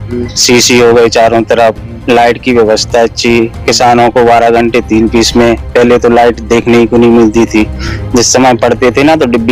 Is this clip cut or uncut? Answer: uncut